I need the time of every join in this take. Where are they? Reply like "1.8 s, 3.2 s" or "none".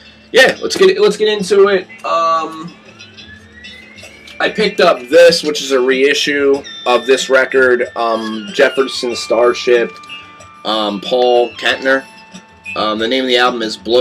7.7 s